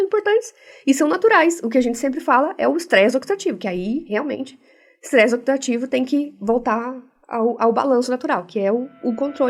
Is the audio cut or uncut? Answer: uncut